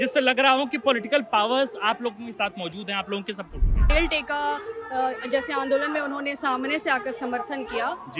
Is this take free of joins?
no; 1 cut; at 3.9 s

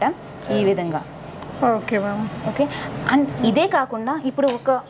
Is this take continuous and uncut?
yes; 0 cuts

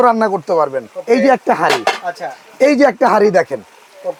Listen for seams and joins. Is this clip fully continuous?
yes; 0 cuts

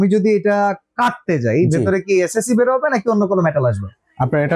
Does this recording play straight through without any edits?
yes; 0 cuts

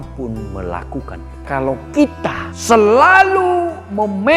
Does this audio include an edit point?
yes; 2 cuts; at 1.4 s, 2.5 s

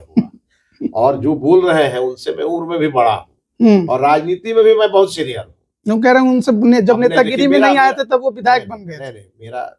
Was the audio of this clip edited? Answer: no; 0 cuts

